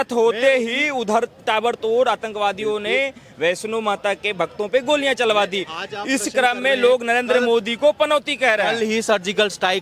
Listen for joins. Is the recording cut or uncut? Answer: uncut